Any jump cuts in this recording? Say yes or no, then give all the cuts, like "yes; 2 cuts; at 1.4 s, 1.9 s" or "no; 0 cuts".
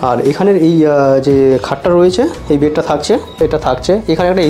yes; 1 cut; at 3.4 s